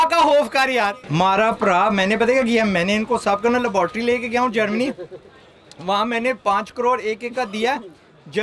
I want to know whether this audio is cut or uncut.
cut